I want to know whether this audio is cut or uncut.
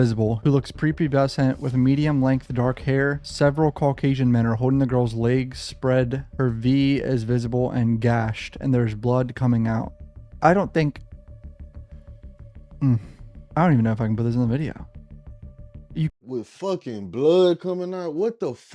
uncut